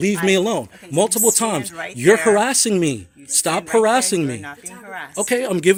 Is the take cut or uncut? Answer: uncut